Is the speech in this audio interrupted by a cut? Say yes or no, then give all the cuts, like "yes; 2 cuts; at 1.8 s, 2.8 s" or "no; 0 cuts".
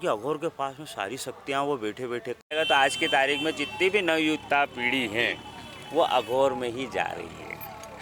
yes; 1 cut; at 2.5 s